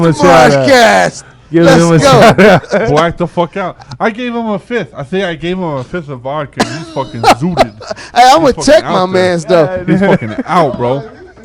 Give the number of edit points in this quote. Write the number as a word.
zero